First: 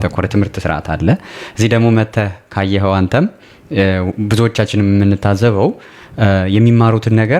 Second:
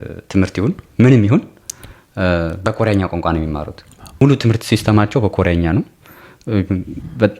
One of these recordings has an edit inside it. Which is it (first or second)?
second